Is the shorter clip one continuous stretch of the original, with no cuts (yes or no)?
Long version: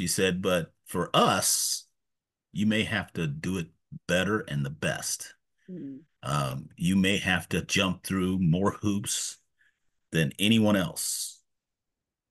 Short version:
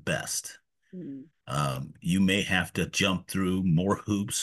yes